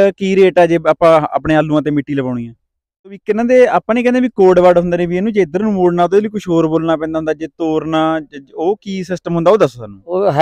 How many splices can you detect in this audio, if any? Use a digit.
1